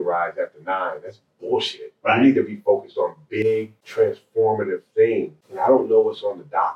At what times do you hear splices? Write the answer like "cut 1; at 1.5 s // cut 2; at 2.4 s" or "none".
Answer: cut 1; at 3.8 s // cut 2; at 5.4 s

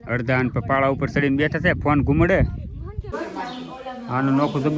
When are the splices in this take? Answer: cut 1; at 3.0 s

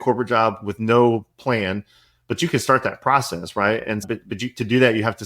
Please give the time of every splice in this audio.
cut 1; at 4.0 s

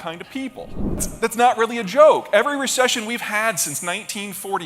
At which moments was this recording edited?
cut 1; at 1.1 s

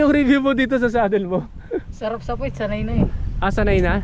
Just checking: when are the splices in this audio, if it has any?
none

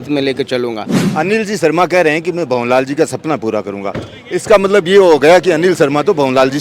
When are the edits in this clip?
cut 1; at 0.9 s

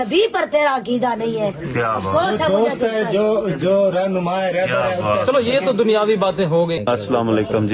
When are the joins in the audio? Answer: cut 1; at 6.8 s

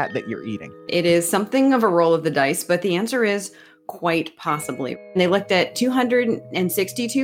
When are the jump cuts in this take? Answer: cut 1; at 0.9 s // cut 2; at 5.1 s

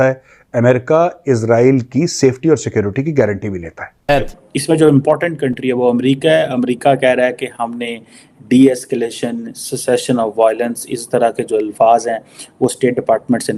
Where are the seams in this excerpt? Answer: cut 1; at 4.3 s

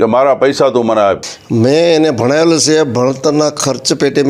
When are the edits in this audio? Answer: cut 1; at 1.3 s

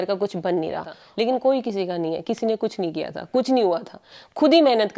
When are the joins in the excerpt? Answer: cut 1; at 1.0 s

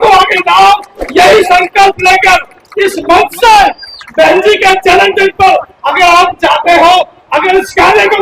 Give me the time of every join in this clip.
none

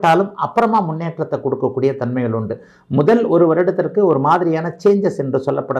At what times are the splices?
none

